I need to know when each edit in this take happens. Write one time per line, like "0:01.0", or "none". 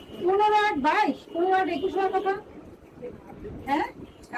none